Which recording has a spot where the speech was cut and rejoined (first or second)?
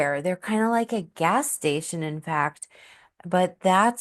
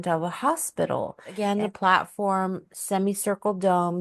second